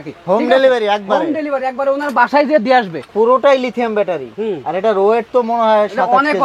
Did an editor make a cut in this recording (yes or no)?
yes